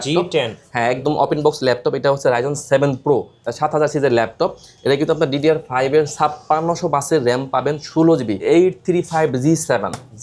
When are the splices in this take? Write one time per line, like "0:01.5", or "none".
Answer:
0:03.4
0:08.4